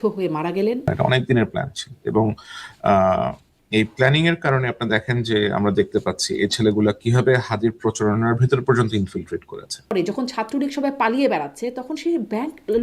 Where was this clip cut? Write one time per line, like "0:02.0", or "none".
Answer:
0:00.9
0:09.9